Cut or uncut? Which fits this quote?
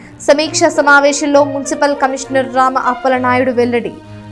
uncut